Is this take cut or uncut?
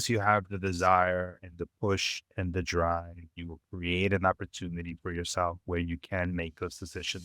uncut